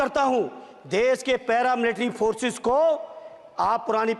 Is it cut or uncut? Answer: uncut